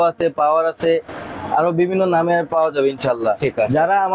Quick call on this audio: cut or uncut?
uncut